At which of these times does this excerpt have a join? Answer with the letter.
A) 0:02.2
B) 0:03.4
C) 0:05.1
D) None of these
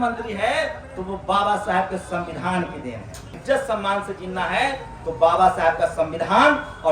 B